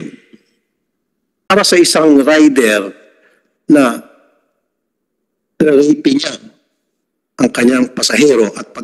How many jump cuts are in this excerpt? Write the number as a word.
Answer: one